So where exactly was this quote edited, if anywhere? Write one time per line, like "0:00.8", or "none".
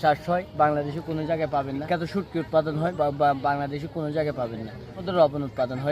0:01.8
0:02.9
0:05.0